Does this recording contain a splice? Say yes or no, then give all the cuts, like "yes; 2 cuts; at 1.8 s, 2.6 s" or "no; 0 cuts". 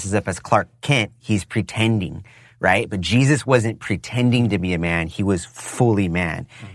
no; 0 cuts